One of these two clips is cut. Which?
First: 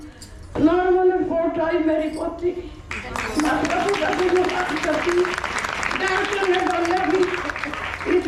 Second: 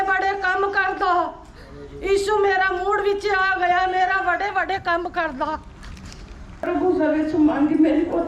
second; 1 cut; at 6.7 s

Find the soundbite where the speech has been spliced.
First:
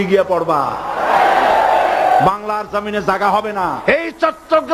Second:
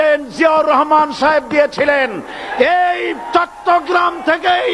first; 1 cut; at 3.8 s

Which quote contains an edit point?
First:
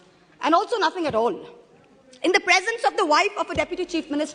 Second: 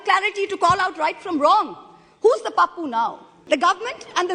second; 1 cut; at 3.3 s

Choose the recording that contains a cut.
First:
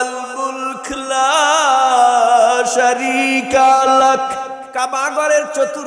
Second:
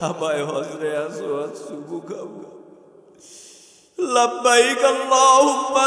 first; 1 cut; at 4.6 s

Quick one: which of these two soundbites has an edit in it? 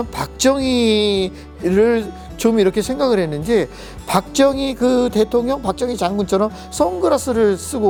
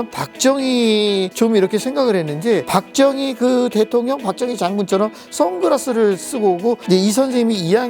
second; 3 cuts; at 1.3 s, 2.7 s, 6.8 s

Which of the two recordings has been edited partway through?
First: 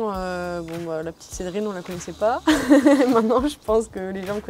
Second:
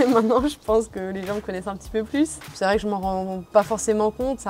second; 1 cut; at 2.5 s

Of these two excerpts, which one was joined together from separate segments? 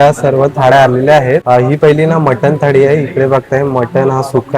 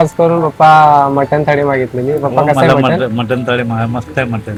first; 1 cut; at 1.4 s

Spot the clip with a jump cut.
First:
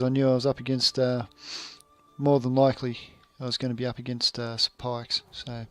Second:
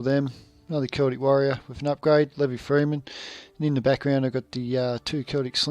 second; 1 cut; at 3.5 s

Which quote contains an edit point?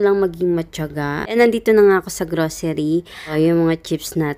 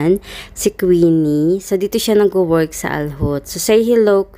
first; 2 cuts; at 1.3 s, 3.3 s

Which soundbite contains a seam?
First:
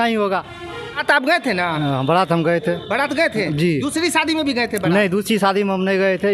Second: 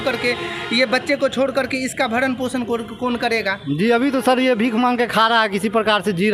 first; 1 cut; at 1.0 s

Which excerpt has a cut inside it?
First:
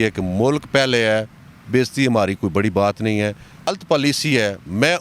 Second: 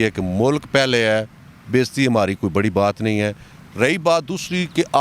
first; 1 cut; at 3.7 s

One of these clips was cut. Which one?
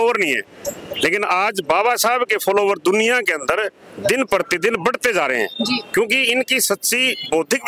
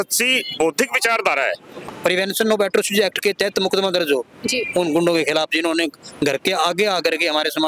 second; 1 cut; at 1.9 s

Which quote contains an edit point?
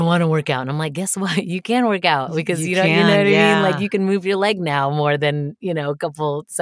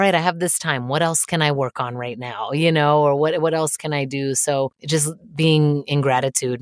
second; 1 cut; at 4.8 s

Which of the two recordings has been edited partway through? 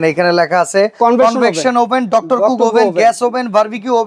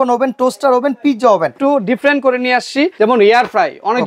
second; 2 cuts; at 1.6 s, 2.9 s

